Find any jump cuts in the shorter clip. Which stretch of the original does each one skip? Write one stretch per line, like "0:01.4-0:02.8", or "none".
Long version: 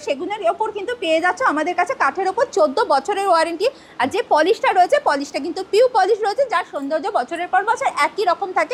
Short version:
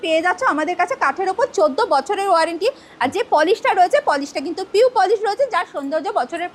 none